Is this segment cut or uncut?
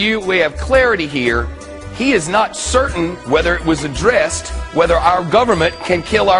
cut